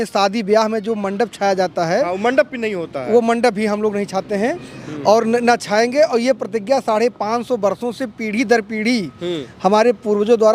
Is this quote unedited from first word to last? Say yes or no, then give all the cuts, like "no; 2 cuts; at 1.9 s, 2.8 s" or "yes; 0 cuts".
yes; 0 cuts